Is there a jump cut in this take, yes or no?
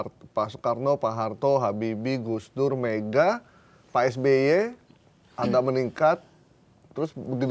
no